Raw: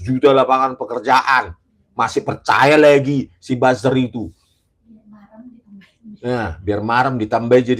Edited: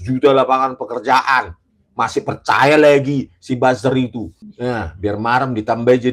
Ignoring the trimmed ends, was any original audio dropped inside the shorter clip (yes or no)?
yes